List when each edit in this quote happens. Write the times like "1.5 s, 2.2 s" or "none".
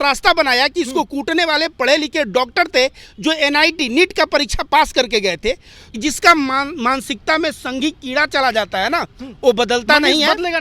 6.0 s